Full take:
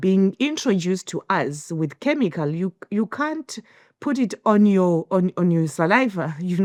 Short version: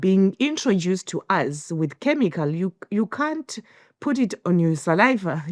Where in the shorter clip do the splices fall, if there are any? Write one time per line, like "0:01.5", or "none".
0:04.4